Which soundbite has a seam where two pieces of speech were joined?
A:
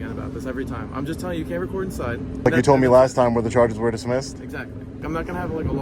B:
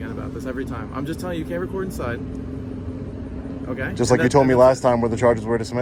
A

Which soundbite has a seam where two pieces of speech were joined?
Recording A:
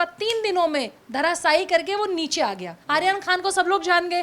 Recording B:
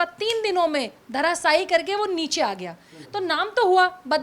A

